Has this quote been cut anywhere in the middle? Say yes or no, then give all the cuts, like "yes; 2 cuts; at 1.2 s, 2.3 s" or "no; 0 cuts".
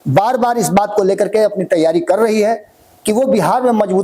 no; 0 cuts